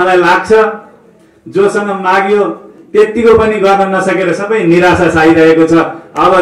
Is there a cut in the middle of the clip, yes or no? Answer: no